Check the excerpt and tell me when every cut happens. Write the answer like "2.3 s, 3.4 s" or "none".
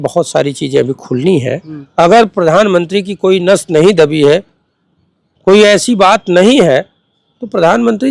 1.8 s